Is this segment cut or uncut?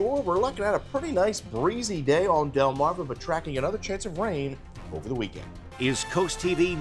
cut